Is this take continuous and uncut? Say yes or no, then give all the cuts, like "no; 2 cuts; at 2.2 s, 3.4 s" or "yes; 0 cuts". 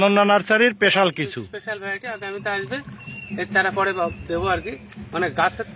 yes; 0 cuts